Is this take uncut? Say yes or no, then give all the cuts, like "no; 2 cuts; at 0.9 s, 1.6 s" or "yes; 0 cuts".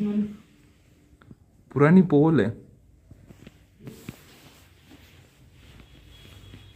no; 1 cut; at 3.9 s